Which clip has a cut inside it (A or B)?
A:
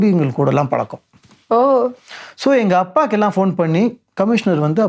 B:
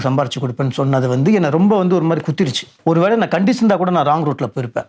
B